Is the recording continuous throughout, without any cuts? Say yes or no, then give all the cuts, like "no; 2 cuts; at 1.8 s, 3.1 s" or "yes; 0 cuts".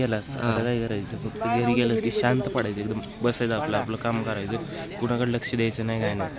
yes; 0 cuts